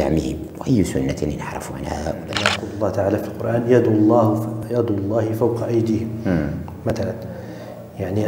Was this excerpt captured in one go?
no; 1 cut; at 2.6 s

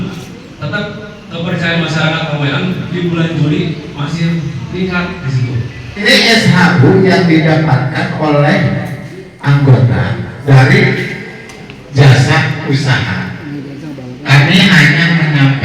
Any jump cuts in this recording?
yes; 1 cut; at 6.0 s

